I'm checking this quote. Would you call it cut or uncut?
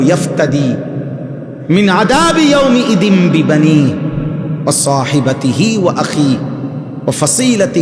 uncut